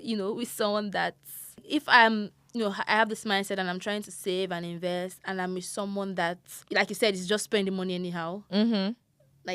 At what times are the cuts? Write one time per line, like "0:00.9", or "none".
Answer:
0:01.6
0:06.5